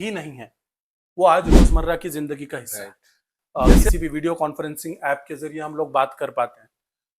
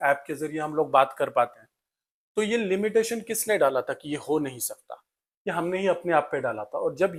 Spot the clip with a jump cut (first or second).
first